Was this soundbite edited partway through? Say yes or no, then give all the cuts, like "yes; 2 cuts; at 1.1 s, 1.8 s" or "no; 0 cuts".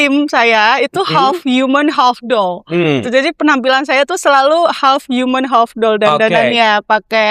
no; 0 cuts